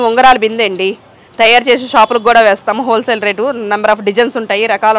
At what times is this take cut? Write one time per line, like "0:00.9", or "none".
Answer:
none